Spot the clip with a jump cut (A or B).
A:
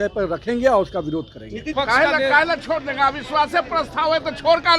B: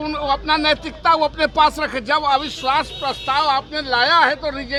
A